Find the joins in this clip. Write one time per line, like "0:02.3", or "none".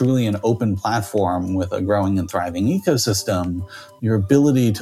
none